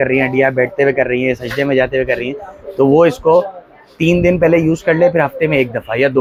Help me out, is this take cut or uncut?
uncut